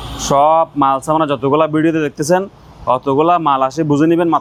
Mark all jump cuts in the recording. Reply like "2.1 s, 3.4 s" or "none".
none